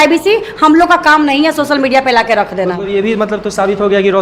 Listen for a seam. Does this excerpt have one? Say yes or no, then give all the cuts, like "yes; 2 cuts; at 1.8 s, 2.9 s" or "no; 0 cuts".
no; 0 cuts